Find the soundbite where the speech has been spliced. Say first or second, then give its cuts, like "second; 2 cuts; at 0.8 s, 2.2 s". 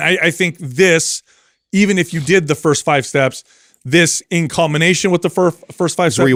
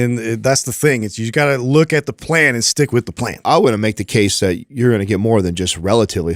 second; 1 cut; at 3.4 s